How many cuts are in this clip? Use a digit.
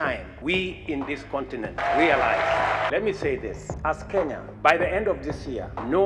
2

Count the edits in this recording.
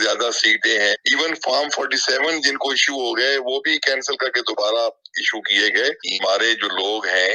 2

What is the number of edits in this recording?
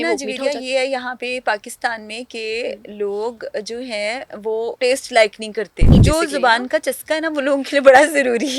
2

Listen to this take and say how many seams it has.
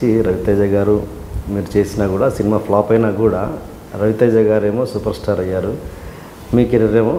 0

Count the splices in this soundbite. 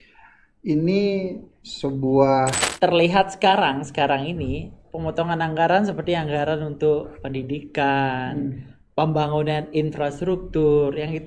1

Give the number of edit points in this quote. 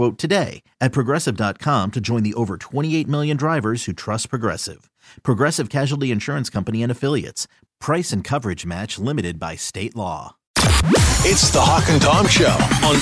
1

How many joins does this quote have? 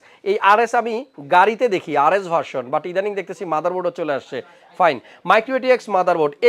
0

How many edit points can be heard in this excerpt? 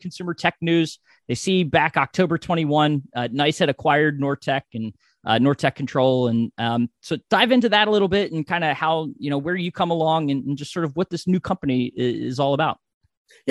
0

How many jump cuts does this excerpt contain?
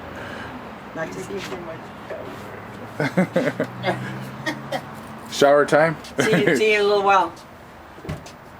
1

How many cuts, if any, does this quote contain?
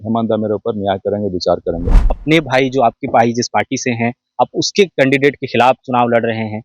1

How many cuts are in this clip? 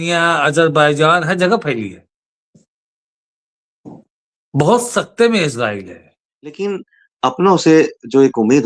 1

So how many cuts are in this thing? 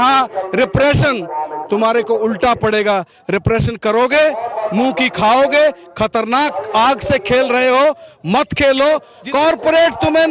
1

